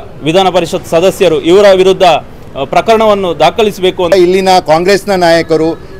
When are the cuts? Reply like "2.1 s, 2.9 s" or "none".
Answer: 4.1 s